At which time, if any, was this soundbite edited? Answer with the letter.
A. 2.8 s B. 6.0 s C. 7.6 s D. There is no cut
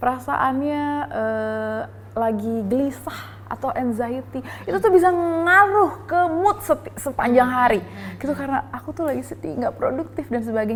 D